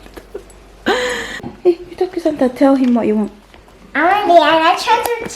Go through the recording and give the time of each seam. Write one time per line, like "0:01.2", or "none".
0:01.5

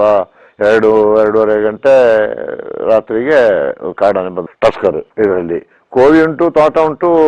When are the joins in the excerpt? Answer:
0:05.1

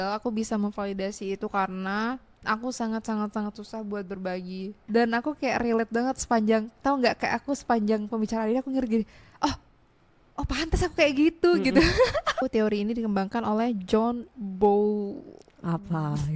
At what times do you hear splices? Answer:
0:04.9
0:12.4

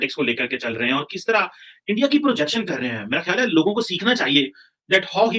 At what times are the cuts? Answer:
none

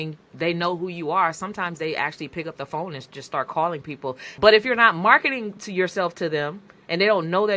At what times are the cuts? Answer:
0:04.2

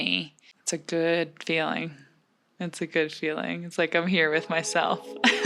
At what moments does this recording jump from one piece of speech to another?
none

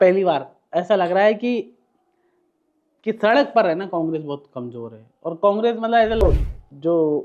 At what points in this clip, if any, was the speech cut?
0:06.2

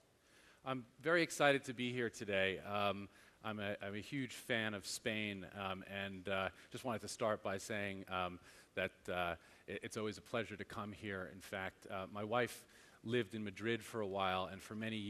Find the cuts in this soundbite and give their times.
0:02.8

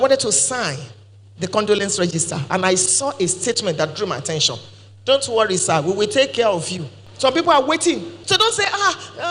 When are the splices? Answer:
none

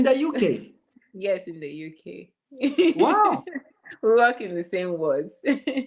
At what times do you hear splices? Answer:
none

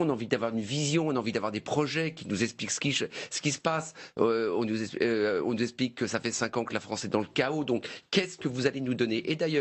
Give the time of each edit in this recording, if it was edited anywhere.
none

